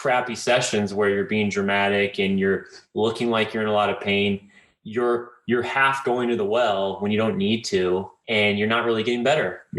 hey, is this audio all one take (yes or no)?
yes